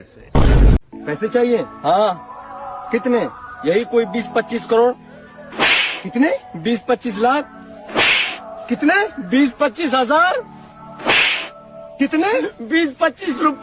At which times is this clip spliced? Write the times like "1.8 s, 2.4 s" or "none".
none